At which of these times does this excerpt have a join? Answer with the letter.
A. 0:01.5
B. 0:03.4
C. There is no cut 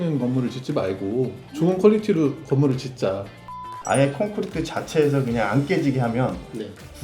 B